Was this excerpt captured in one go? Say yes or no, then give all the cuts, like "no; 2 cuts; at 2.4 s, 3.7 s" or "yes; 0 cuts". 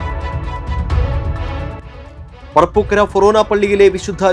yes; 0 cuts